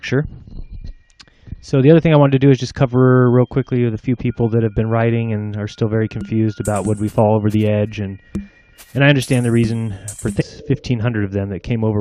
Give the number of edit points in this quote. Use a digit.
0